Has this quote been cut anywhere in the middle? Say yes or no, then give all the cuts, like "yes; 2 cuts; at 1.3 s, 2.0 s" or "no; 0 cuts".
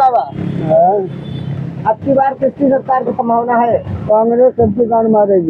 no; 0 cuts